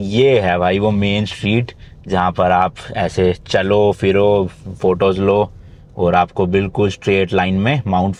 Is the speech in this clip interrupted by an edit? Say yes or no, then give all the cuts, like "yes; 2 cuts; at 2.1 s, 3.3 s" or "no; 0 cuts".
no; 0 cuts